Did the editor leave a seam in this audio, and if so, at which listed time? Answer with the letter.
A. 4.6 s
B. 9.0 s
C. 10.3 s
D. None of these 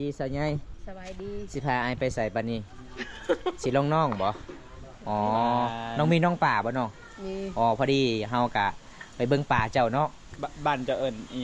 C